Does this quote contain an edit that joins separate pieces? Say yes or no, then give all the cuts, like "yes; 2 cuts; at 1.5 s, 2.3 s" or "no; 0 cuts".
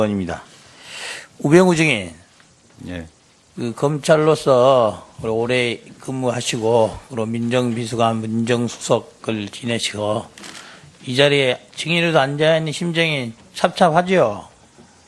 no; 0 cuts